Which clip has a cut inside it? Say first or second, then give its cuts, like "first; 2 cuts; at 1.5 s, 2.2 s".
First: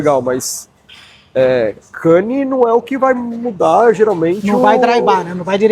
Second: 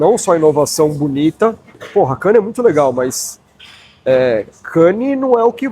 second; 1 cut; at 1.8 s